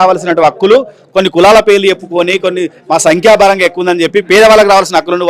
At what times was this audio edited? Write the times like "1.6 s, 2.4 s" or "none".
none

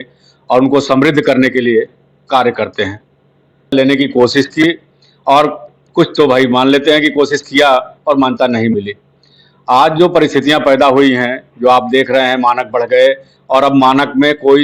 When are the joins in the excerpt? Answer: 3.7 s

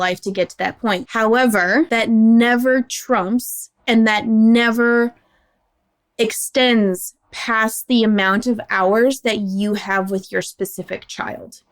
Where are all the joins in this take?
1.1 s, 1.9 s

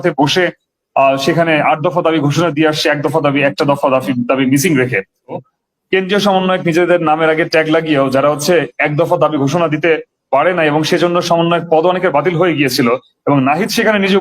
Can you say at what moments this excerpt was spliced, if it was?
5.4 s

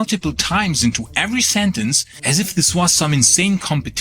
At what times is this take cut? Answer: 2.1 s

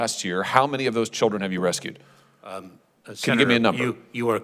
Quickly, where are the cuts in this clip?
none

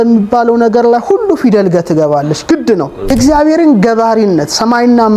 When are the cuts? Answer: 3.1 s

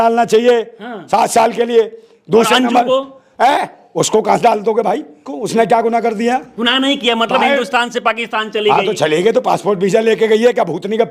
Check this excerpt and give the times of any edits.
5.3 s

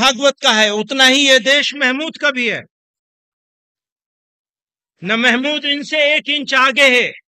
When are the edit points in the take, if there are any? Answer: none

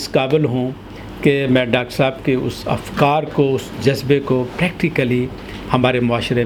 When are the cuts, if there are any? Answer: none

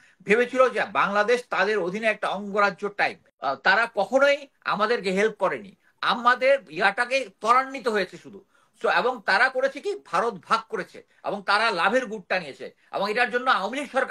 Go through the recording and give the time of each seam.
3.3 s

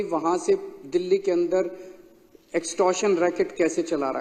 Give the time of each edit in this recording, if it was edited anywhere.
none

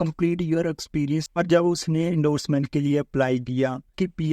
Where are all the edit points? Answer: 1.2 s

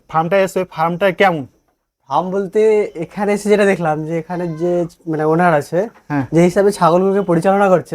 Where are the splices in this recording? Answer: none

